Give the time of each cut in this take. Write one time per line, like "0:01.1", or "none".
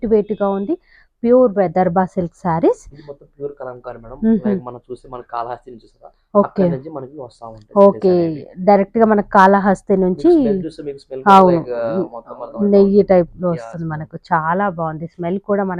none